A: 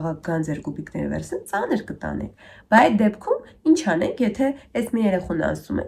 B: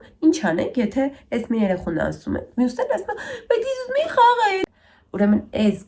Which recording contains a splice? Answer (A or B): B